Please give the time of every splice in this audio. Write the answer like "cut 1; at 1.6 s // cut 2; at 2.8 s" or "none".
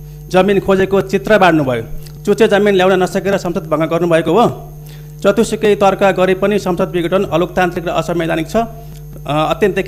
none